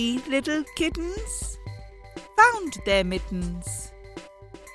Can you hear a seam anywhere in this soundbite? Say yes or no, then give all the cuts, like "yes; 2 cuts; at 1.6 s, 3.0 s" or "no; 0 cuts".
no; 0 cuts